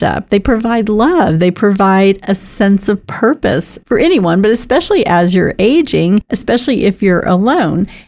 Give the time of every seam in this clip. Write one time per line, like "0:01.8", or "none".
0:06.3